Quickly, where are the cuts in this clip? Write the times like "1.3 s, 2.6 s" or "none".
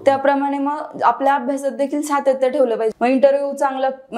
2.9 s